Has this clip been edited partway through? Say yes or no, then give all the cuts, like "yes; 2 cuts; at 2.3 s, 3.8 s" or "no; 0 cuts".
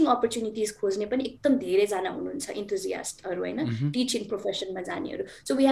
no; 0 cuts